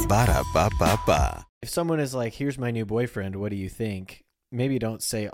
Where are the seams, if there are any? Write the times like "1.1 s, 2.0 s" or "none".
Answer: 1.6 s